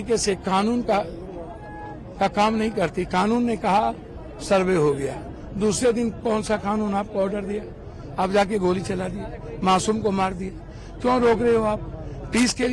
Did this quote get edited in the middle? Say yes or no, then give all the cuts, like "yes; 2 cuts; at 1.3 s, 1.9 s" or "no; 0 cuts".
no; 0 cuts